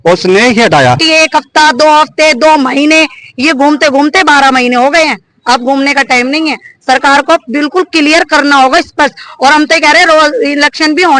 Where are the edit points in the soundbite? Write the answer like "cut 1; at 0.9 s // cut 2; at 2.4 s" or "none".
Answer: cut 1; at 1.0 s